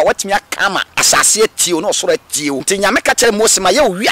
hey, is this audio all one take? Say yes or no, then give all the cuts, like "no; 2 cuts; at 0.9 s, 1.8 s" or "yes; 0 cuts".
no; 2 cuts; at 0.9 s, 2.6 s